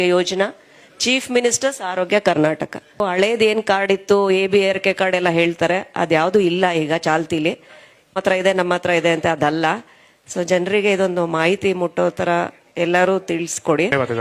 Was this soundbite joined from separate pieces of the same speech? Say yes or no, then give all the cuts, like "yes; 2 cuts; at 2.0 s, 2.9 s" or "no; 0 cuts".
yes; 1 cut; at 3.0 s